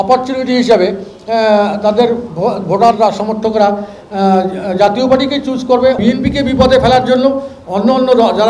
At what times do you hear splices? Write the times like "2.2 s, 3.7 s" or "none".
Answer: 6.0 s